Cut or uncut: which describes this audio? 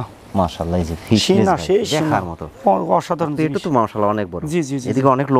uncut